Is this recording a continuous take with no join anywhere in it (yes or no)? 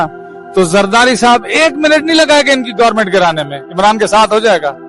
yes